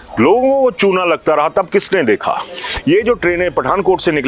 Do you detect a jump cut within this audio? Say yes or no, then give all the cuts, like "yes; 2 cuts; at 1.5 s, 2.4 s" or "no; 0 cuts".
yes; 1 cut; at 2.6 s